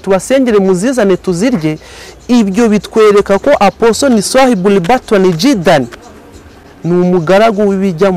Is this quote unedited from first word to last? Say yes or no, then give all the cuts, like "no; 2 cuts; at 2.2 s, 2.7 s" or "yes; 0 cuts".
yes; 0 cuts